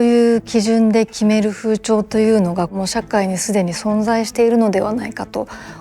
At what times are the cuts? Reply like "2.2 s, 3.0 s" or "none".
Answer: 2.7 s